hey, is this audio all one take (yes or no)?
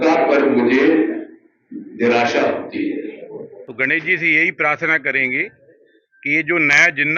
no